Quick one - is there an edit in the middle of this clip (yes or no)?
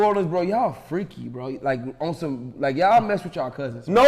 no